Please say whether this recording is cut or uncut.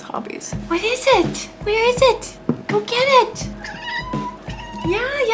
cut